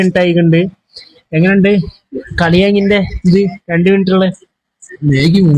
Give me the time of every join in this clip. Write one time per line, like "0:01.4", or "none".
none